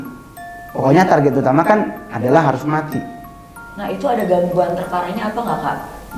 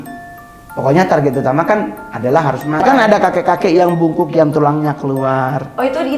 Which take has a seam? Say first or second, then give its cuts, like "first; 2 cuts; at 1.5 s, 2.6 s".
second; 1 cut; at 2.8 s